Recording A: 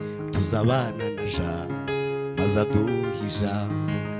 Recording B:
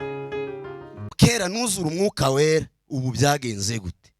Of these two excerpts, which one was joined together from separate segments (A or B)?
B